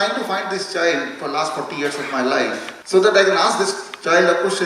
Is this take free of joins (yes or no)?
yes